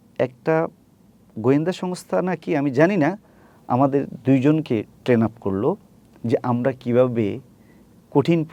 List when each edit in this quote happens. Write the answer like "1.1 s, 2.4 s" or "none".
none